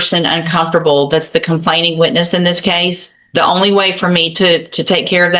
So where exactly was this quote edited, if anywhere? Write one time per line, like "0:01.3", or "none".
none